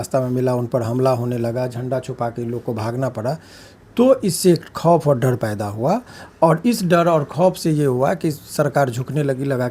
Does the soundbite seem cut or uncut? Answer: uncut